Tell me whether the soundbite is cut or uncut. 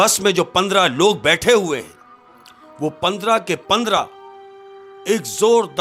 uncut